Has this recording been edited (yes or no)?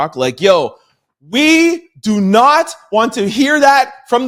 no